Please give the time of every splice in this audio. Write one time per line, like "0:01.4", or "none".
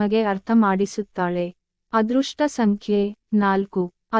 0:02.8